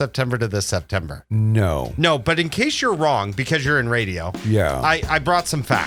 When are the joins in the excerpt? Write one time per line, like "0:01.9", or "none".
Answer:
none